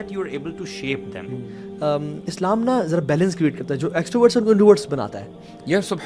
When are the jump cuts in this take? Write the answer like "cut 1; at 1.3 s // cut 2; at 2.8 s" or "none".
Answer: cut 1; at 1.6 s